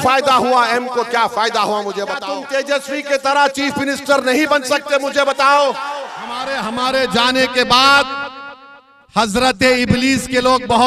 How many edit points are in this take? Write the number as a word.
two